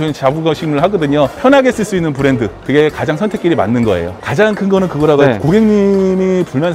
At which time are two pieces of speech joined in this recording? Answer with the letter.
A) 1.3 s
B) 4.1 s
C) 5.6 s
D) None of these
B